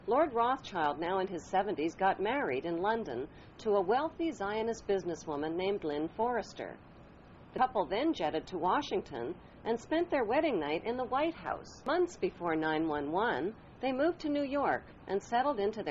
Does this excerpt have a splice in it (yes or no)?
yes